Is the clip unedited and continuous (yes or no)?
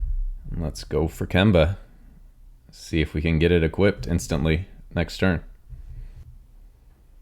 no